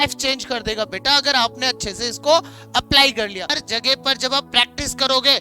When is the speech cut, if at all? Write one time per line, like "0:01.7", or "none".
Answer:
0:03.6